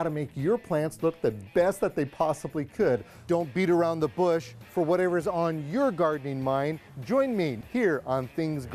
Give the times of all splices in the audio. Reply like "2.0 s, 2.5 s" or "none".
7.6 s